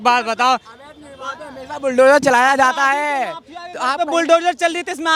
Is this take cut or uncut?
uncut